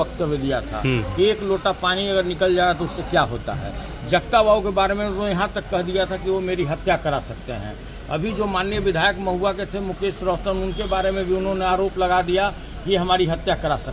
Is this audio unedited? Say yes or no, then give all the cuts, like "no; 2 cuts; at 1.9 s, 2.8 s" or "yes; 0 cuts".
yes; 0 cuts